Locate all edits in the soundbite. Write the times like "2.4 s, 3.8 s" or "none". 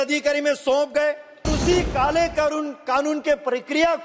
1.5 s